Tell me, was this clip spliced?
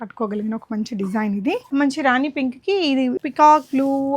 yes; 2 cuts; at 1.7 s, 3.2 s

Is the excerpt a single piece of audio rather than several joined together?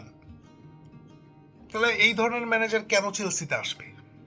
yes; 0 cuts

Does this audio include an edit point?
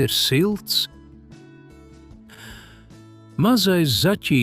yes; 2 cuts; at 1.1 s, 3.3 s

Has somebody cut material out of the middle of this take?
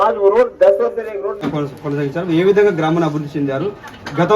yes; 1 cut; at 1.3 s

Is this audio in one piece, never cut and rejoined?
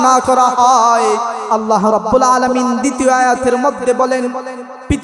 no; 1 cut; at 1.4 s

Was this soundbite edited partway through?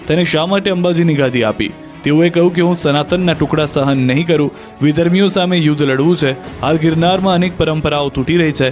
no; 0 cuts

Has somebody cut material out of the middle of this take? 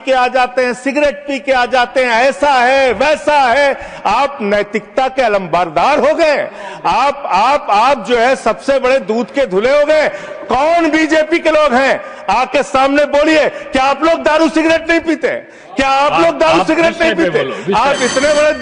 no; 0 cuts

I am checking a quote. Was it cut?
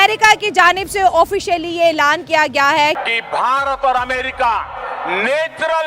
no; 0 cuts

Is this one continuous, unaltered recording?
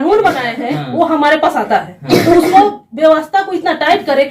yes; 0 cuts

